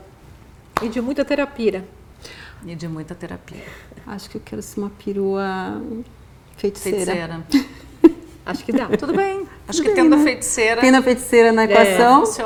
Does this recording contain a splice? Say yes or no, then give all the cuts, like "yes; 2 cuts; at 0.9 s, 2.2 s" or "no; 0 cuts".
no; 0 cuts